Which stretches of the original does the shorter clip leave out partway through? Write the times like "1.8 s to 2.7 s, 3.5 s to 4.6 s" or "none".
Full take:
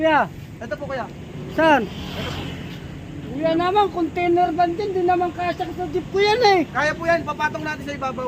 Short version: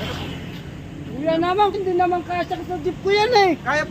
3.9 s to 4.8 s